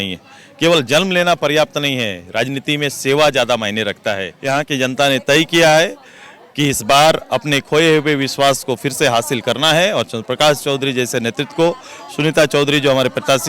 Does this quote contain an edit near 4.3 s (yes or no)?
yes